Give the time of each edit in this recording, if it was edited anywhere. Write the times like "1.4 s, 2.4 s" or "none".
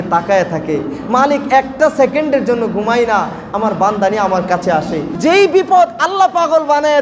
5.2 s